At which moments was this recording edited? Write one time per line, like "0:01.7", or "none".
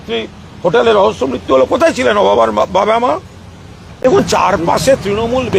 0:03.9

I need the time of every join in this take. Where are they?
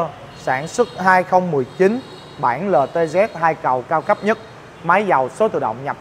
none

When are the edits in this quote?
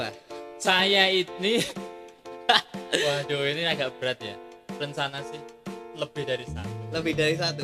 none

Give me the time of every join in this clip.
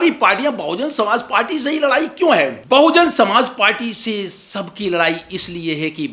0:02.6

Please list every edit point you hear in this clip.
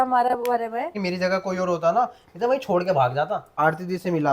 0:01.0
0:03.6

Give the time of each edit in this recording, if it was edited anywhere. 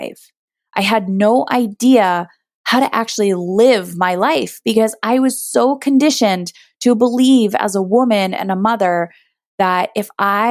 none

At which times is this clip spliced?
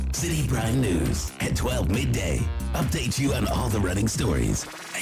none

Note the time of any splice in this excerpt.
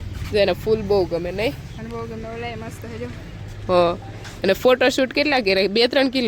none

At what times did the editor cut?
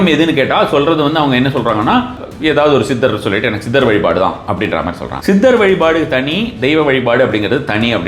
0:02.2
0:05.1

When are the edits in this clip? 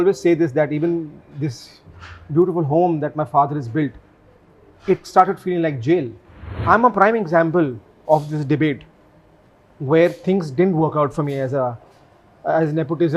0:06.6

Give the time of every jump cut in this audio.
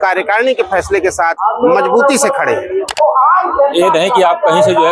0:02.9

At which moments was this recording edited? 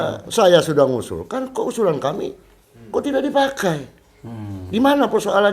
none

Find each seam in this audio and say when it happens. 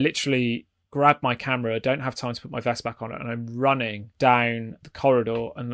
0:04.0
0:04.8

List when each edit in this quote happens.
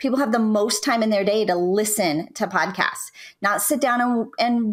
none

